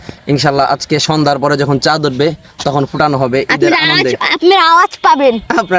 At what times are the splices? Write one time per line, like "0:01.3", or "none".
none